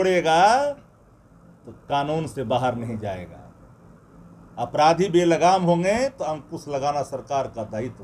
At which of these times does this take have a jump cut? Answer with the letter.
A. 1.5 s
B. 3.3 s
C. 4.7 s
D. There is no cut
D